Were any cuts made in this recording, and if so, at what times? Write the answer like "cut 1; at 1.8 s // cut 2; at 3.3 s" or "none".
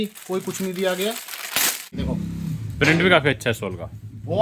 cut 1; at 2.0 s